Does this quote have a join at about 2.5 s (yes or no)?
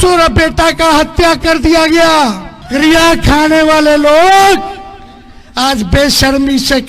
yes